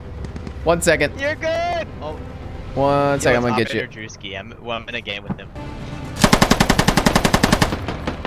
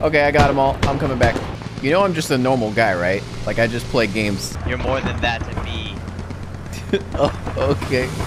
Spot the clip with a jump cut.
second; 3 cuts; at 1.5 s, 3.3 s, 4.7 s

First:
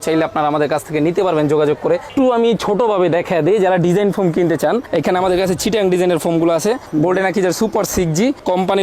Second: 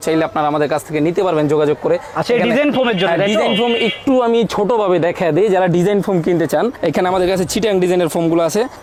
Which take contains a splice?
first; 1 cut; at 2.1 s

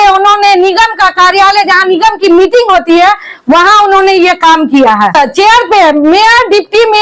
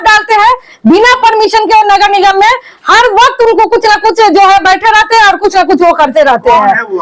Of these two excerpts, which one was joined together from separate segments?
first; 1 cut; at 5.1 s

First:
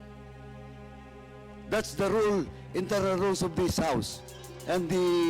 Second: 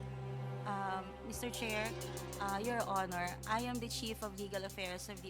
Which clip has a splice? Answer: first; 1 cut; at 1.1 s

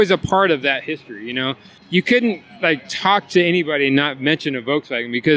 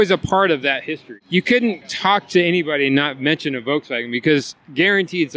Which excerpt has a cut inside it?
second; 2 cuts; at 1.1 s, 1.9 s

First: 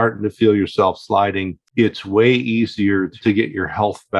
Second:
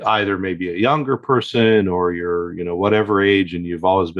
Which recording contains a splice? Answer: first; 2 cuts; at 1.6 s, 3.1 s

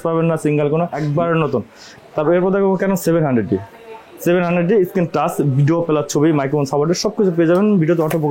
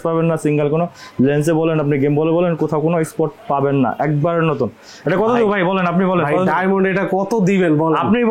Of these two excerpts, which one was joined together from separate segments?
first; 2 cuts; at 1.0 s, 1.8 s

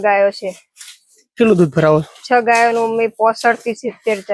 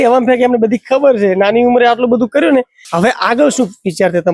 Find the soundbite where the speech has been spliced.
second; 1 cut; at 2.8 s

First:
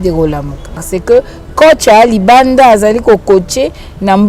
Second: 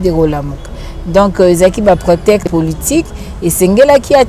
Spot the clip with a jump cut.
first; 1 cut; at 0.9 s

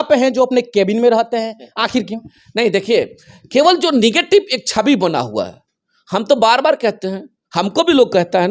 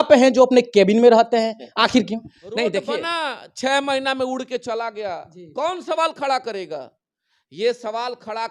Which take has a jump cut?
second; 1 cut; at 2.9 s

